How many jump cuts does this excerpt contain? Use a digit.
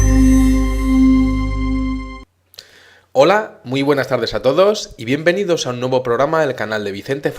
1